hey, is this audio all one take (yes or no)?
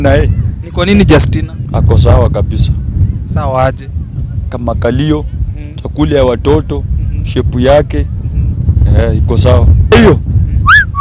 no